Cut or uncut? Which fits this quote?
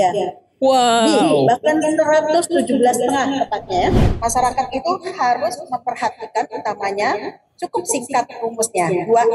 cut